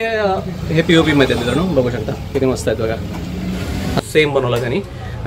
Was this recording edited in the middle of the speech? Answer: yes; 1 cut; at 4.0 s

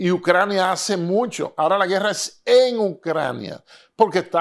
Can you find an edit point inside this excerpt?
no; 0 cuts

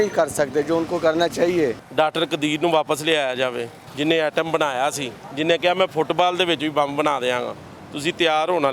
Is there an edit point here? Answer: yes; 2 cuts; at 1.8 s, 3.8 s

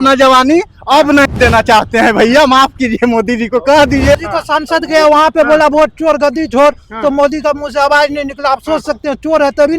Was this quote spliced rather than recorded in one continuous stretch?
yes; 1 cut; at 4.2 s

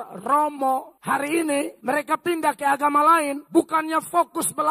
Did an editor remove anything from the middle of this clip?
yes; 3 cuts; at 0.9 s, 1.7 s, 3.4 s

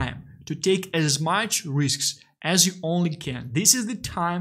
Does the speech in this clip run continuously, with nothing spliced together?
yes; 0 cuts

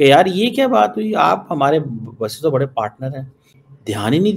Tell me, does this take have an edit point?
no; 0 cuts

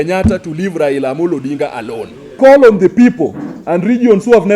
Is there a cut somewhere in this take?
yes; 1 cut; at 2.3 s

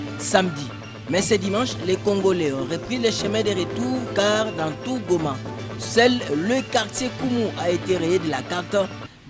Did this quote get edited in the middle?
no; 0 cuts

